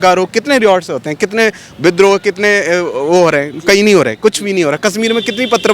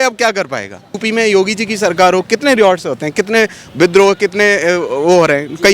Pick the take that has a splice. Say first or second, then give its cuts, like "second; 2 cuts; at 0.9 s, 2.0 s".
second; 1 cut; at 1.0 s